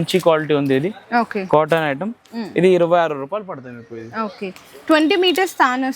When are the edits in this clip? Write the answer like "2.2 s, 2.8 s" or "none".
none